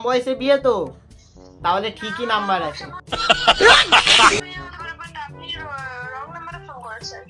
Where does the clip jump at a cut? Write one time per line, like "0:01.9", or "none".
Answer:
none